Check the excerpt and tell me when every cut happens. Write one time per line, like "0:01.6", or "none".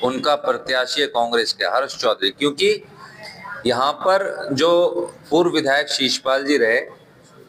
none